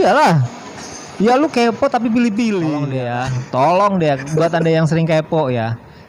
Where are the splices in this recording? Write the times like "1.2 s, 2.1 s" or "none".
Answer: 2.9 s